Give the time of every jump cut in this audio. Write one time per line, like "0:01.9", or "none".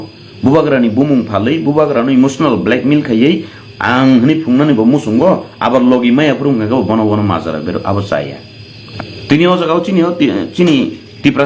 0:08.8